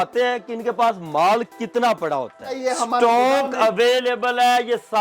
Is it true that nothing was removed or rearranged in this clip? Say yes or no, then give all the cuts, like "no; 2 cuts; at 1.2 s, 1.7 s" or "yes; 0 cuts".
no; 1 cut; at 2.6 s